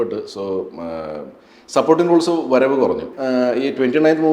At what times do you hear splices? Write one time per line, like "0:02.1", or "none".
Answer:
0:03.1